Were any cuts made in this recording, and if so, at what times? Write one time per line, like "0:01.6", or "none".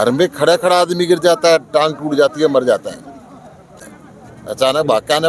0:03.9